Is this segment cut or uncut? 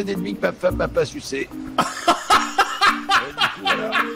uncut